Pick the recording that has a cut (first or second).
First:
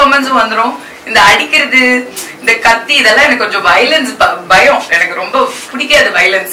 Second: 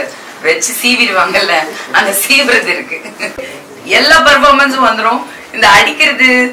second